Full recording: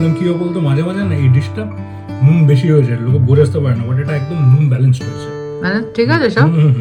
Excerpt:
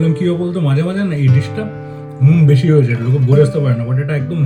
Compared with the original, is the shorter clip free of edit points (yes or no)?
yes